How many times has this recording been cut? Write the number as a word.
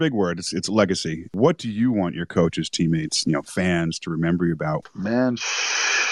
two